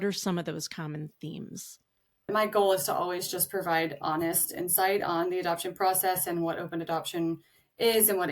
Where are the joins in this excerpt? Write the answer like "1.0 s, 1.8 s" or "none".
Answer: 2.3 s